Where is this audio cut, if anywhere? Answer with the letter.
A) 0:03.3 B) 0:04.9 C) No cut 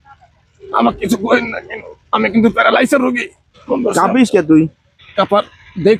C